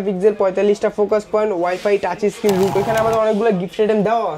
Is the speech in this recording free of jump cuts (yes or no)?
no